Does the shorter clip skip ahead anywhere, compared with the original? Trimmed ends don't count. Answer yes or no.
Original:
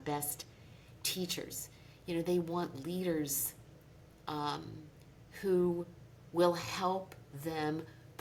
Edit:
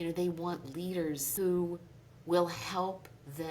yes